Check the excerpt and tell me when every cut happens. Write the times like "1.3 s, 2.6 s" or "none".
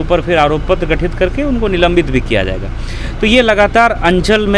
none

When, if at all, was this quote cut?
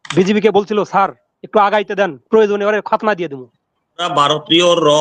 4.1 s

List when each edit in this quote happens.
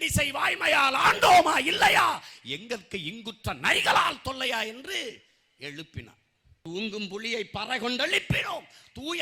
6.6 s

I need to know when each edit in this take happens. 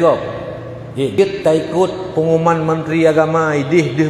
1.1 s

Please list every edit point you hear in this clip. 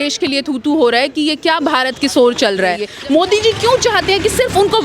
2.9 s

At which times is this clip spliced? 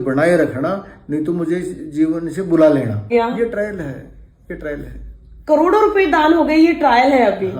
3.1 s

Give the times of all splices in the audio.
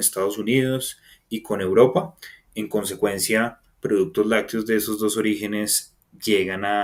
none

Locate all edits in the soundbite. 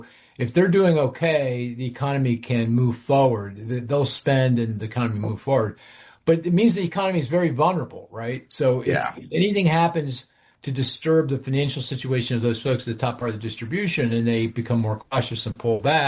none

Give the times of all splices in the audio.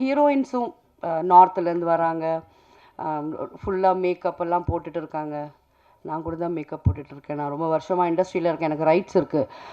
none

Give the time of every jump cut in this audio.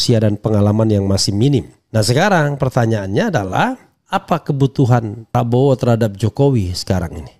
1.8 s, 3.9 s, 5.3 s

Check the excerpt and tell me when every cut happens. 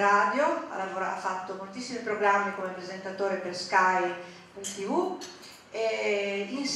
none

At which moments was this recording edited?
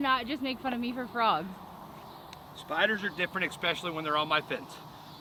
none

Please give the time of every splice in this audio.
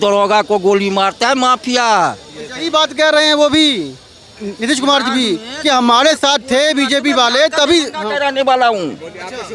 none

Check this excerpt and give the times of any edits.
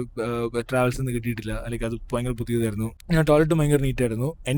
none

